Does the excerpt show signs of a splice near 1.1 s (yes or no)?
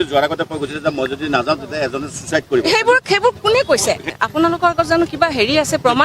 no